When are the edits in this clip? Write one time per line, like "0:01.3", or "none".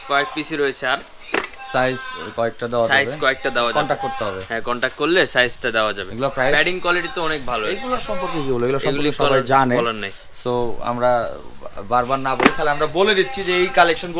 none